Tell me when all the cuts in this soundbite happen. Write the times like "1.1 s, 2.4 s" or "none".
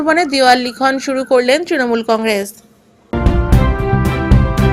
3.1 s